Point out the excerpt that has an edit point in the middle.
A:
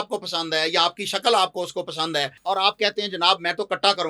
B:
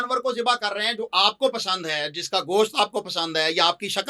A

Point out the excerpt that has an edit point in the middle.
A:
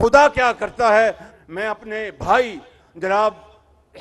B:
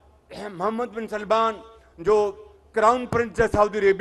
A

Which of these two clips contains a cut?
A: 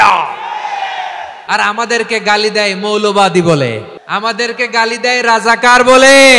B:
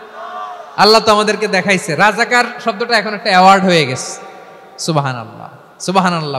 A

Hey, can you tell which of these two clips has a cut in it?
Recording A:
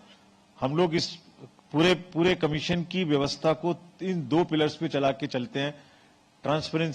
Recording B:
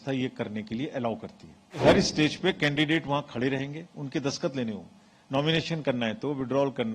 B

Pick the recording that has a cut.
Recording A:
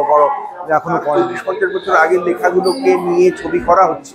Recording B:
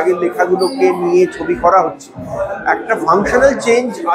A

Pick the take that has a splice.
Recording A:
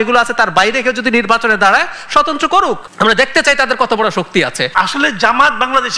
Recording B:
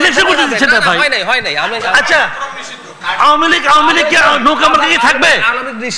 A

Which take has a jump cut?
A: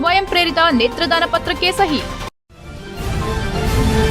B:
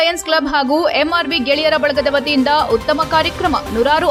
A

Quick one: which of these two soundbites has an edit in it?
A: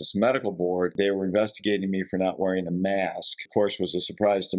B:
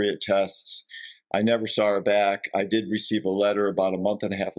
A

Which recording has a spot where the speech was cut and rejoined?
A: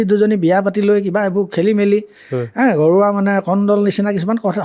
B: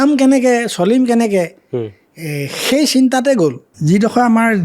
B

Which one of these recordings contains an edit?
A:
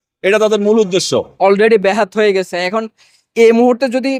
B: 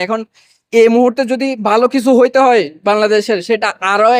A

